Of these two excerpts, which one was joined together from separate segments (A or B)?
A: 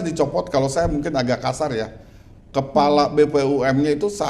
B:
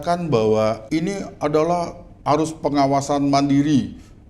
B